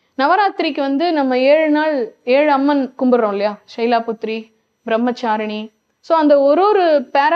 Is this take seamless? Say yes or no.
yes